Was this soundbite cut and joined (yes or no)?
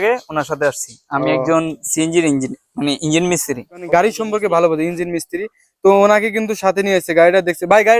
yes